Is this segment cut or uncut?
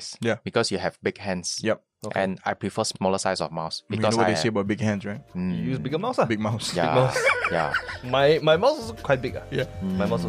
cut